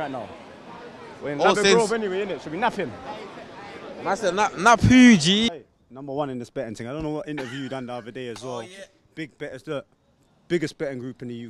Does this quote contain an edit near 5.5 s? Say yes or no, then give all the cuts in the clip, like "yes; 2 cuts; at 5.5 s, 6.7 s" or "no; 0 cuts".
yes; 1 cut; at 5.5 s